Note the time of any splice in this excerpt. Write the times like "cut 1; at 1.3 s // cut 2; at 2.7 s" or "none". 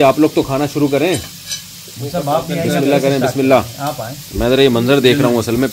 none